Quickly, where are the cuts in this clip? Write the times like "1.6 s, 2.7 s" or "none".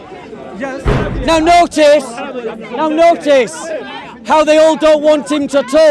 1.1 s

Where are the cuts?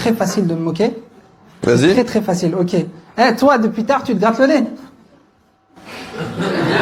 none

